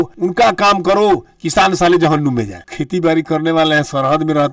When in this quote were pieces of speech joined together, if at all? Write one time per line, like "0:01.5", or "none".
0:02.6